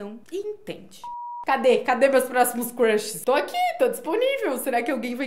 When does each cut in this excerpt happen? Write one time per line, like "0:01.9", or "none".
0:01.3